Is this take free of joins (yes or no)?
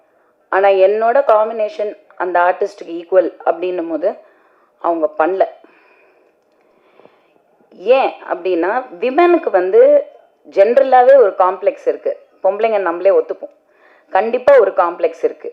yes